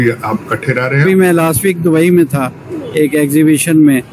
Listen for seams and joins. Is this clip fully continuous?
no; 1 cut; at 1.1 s

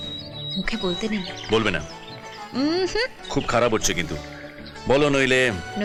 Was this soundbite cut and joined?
no; 0 cuts

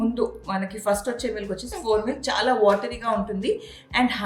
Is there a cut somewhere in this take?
no; 0 cuts

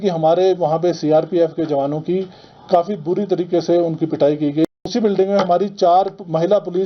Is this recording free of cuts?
no; 1 cut; at 4.8 s

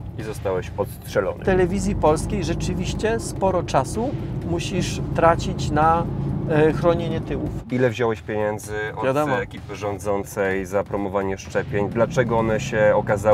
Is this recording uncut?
no; 2 cuts; at 1.4 s, 7.5 s

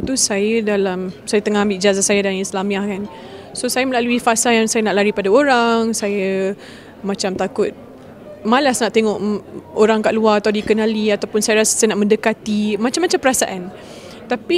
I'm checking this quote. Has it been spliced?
yes; 1 cut; at 1.1 s

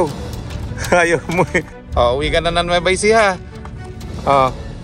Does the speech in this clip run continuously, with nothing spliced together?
no; 1 cut; at 1.8 s

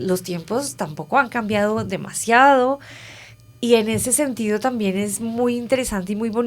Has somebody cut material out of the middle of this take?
no; 0 cuts

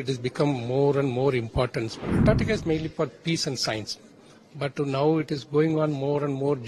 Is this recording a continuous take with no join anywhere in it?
no; 1 cut; at 2.1 s

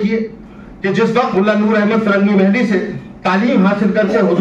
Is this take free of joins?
no; 1 cut; at 1.3 s

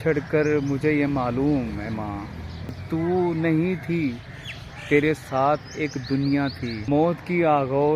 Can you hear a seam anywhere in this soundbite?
yes; 2 cuts; at 2.8 s, 6.8 s

